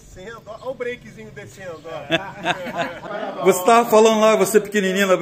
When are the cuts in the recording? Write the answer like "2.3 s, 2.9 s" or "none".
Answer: 3.0 s